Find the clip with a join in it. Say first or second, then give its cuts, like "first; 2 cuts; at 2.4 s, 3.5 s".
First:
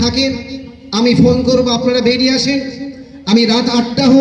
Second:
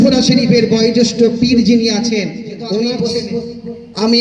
second; 1 cut; at 3.2 s